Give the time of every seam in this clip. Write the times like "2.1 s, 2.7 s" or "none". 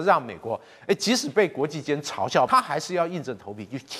2.5 s